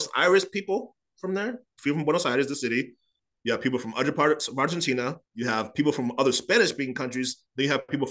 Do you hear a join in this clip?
no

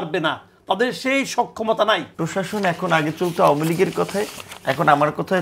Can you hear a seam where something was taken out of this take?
yes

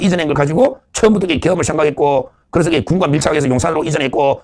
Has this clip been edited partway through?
no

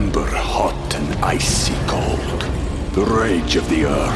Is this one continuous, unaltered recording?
yes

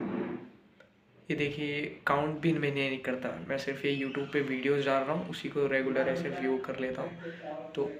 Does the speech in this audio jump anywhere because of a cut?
no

